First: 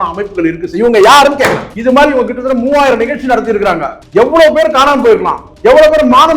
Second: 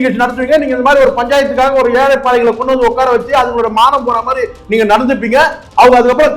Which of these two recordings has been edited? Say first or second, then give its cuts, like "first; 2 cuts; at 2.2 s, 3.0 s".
first; 1 cut; at 1.7 s